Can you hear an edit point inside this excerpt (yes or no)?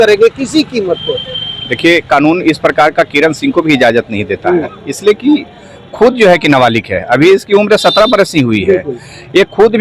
no